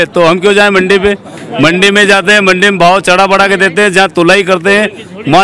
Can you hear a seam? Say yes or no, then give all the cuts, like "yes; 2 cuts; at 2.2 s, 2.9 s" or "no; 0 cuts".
no; 0 cuts